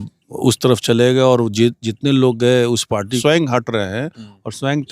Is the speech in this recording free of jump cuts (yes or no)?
no